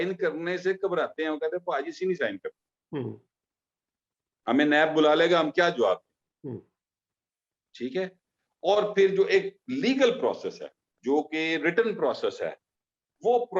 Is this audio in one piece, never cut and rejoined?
yes; 0 cuts

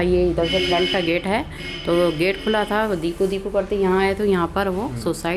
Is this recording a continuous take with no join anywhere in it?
yes; 0 cuts

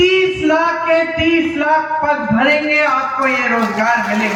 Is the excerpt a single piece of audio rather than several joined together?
yes; 0 cuts

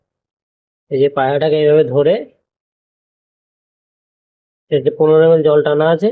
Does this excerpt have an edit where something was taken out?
no; 0 cuts

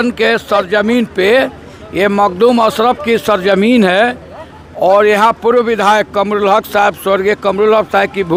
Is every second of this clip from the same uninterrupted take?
yes; 0 cuts

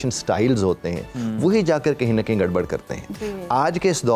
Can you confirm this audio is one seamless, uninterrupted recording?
yes; 0 cuts

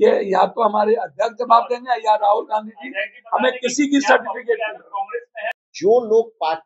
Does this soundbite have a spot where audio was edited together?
yes; 1 cut; at 5.7 s

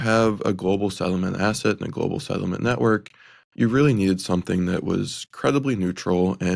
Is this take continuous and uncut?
yes; 0 cuts

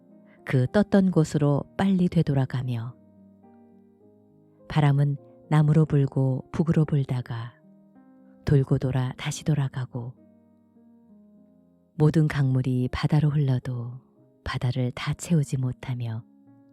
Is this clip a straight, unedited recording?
no; 4 cuts; at 3.2 s, 4.7 s, 10.3 s, 12.0 s

